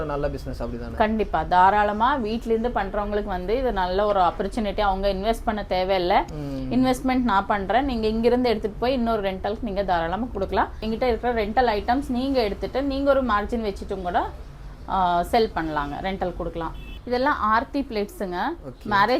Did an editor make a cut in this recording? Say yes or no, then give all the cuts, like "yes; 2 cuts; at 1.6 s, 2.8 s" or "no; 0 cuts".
yes; 2 cuts; at 10.8 s, 16.8 s